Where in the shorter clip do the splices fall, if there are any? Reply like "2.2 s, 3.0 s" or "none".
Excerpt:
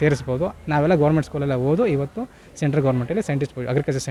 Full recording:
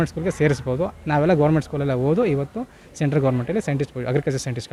none